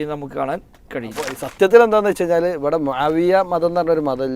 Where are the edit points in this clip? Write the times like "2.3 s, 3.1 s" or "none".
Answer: 1.3 s